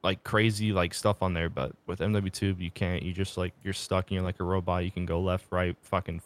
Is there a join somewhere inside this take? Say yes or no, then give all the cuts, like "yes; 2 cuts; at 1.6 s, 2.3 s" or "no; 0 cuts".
no; 0 cuts